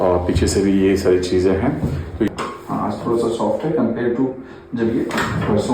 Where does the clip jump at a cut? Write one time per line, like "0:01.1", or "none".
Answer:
0:02.3